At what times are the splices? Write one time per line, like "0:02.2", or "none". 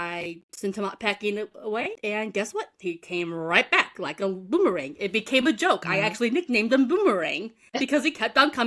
0:02.0